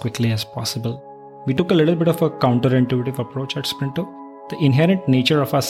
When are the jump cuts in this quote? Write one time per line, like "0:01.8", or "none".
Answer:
0:01.5
0:04.5